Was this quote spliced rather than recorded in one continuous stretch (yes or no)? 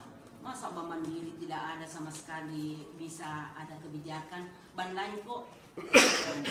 no